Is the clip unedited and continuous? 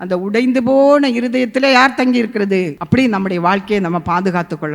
no; 1 cut; at 2.8 s

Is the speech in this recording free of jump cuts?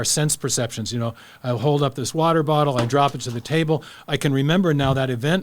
yes; 0 cuts

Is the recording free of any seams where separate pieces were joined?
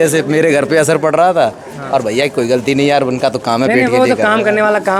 yes; 0 cuts

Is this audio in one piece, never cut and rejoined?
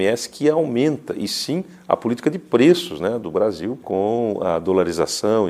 no; 1 cut; at 3.8 s

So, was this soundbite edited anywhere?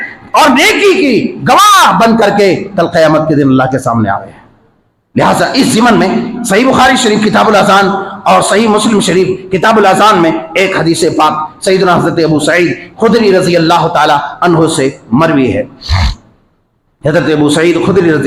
no; 0 cuts

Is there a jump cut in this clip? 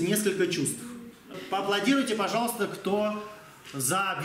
yes; 1 cut; at 1.4 s

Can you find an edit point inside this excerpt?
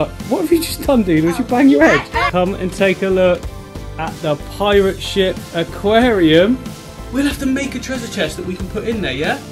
yes; 2 cuts; at 2.3 s, 7.0 s

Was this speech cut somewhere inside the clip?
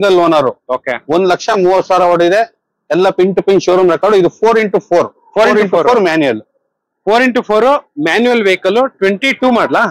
no; 0 cuts

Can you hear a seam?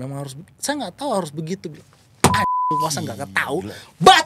no; 0 cuts

